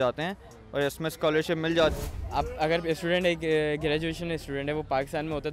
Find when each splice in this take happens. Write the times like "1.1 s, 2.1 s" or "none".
1.9 s